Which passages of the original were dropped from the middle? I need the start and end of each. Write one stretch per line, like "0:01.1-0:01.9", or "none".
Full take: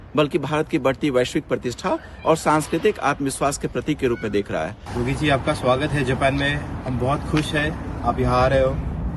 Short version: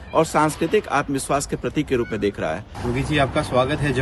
none